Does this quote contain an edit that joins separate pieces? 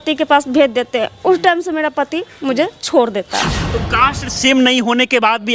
yes; 1 cut; at 3.6 s

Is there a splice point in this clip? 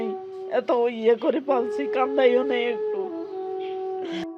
yes; 1 cut; at 2.7 s

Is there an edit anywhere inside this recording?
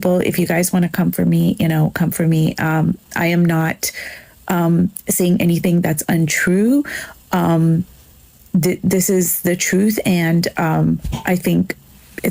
no; 0 cuts

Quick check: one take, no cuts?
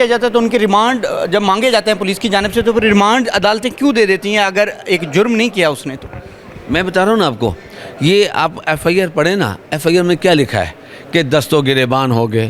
yes; 0 cuts

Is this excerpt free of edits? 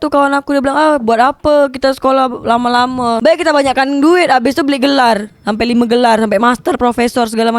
yes; 0 cuts

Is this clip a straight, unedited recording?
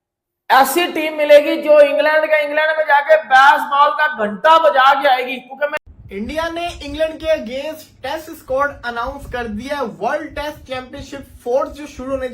no; 1 cut; at 5.7 s

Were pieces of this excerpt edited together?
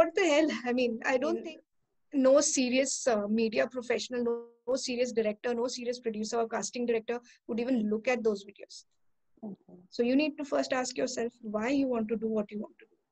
yes; 2 cuts; at 1.4 s, 9.7 s

